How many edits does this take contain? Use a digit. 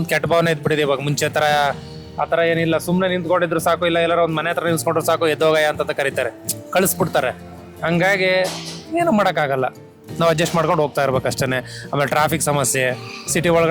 0